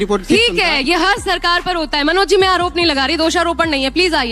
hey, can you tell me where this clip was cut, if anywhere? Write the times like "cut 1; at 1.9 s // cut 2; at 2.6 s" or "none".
none